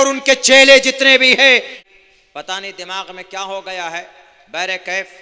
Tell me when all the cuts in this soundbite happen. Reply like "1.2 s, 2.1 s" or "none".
1.7 s